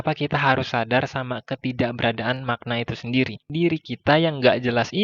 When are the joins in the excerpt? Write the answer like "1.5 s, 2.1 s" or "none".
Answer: 3.4 s